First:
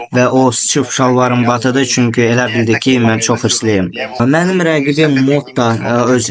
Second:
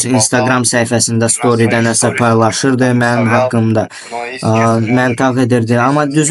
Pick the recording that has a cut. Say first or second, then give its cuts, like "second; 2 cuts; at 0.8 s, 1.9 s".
first; 1 cut; at 4.2 s